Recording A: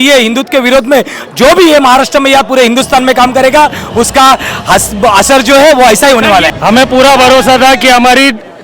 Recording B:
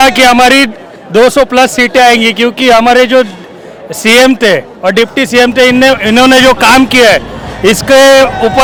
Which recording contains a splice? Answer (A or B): A